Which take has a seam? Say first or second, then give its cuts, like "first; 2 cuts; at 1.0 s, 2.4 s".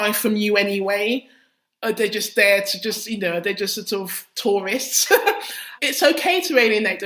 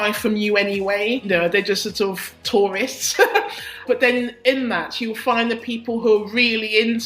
second; 2 cuts; at 1.3 s, 3.8 s